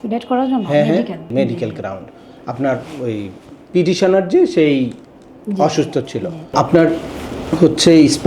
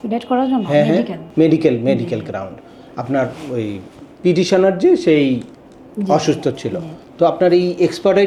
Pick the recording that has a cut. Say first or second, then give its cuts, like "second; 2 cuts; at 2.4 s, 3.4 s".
first; 2 cuts; at 1.3 s, 6.5 s